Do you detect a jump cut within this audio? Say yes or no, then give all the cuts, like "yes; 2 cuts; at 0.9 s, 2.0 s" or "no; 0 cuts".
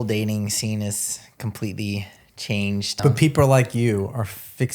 yes; 1 cut; at 3.0 s